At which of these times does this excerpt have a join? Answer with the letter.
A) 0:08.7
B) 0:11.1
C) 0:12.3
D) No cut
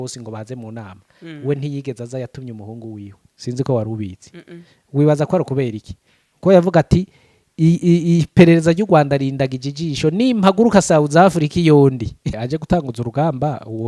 C